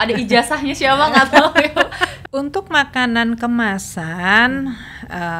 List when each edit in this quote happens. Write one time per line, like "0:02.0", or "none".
0:02.2